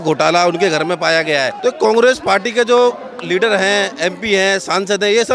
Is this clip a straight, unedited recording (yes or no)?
no